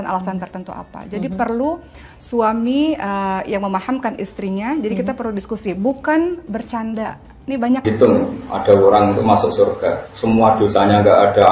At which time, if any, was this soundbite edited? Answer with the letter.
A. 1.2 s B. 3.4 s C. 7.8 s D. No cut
C